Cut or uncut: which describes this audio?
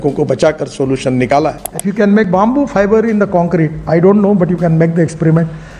cut